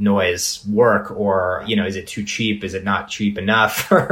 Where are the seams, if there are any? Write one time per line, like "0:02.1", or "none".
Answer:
0:01.6